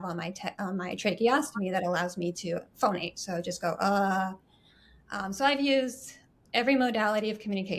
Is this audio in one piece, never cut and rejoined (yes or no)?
yes